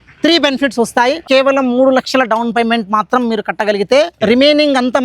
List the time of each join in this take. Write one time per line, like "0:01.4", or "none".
0:01.2
0:04.1

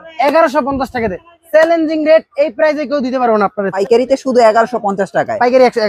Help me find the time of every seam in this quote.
0:03.8

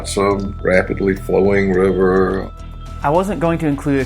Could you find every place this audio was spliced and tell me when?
0:02.4

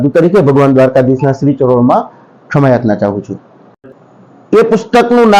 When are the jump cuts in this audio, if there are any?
none

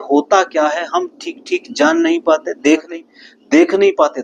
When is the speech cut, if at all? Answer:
0:02.9

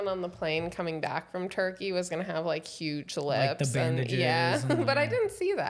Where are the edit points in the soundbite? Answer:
none

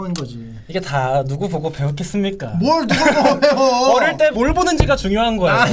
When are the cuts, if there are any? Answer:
0:04.0

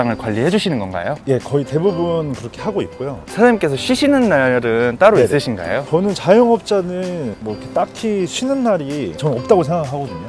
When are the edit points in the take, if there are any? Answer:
0:03.2

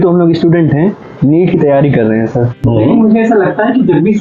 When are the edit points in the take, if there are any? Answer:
0:02.5

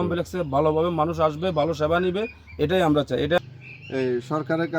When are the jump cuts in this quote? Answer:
0:03.4

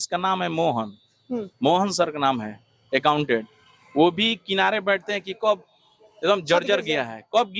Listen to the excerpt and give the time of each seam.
none

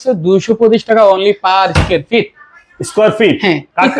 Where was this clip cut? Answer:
none

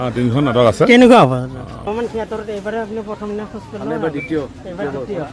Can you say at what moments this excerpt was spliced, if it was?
0:01.8

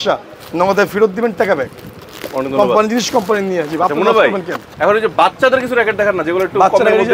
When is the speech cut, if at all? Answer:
none

